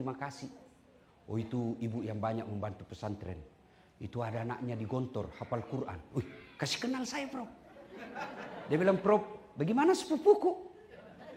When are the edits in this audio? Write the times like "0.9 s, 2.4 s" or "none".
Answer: none